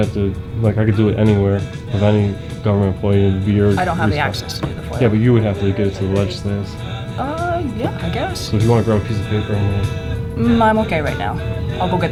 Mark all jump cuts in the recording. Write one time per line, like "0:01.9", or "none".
none